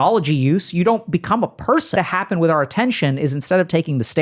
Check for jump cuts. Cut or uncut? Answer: cut